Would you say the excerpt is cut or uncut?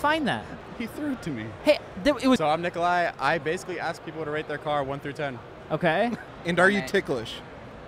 cut